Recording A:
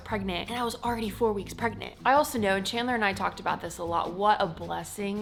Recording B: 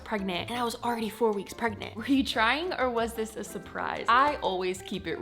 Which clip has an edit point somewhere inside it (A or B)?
B